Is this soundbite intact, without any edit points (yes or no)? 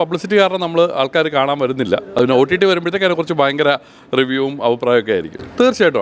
yes